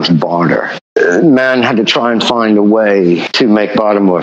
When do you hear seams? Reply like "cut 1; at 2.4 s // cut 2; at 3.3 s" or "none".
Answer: cut 1; at 0.9 s // cut 2; at 3.3 s